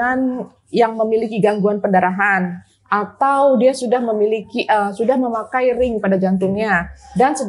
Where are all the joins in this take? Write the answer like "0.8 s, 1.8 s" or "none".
none